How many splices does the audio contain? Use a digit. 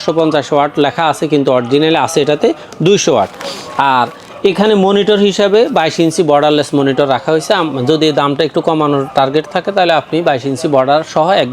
0